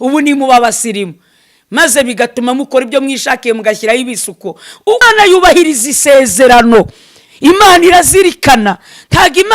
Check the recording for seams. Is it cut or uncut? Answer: cut